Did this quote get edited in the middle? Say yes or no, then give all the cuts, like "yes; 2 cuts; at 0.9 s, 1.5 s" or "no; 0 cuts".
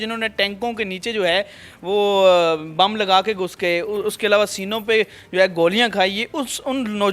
no; 0 cuts